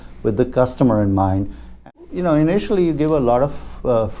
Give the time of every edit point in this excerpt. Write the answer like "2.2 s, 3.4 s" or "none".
1.7 s